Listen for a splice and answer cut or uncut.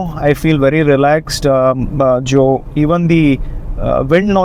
uncut